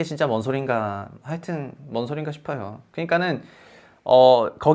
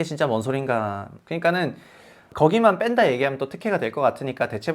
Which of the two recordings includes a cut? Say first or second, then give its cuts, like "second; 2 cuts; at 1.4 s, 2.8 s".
second; 2 cuts; at 1.1 s, 2.3 s